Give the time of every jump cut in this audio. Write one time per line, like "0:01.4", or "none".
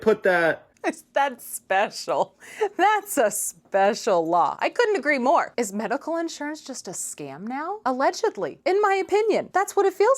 0:05.5